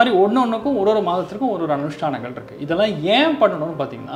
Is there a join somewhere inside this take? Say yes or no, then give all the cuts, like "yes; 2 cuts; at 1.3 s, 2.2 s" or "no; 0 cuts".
no; 0 cuts